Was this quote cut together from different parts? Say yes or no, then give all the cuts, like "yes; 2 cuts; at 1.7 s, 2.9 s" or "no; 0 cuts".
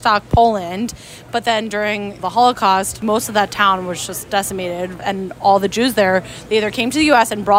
yes; 3 cuts; at 2.2 s, 3.0 s, 5.0 s